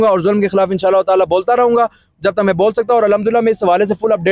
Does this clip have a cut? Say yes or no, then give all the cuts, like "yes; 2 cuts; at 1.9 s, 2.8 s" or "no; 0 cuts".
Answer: no; 0 cuts